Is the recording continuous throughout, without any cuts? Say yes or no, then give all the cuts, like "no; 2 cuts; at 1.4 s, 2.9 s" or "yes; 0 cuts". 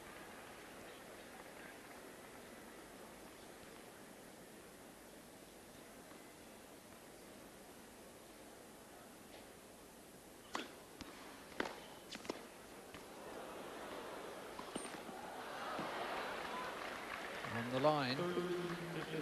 no; 1 cut; at 2.3 s